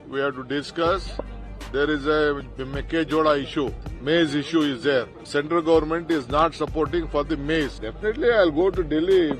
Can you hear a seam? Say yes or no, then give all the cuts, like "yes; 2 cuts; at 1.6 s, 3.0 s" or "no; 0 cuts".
yes; 3 cuts; at 3.9 s, 5.2 s, 7.9 s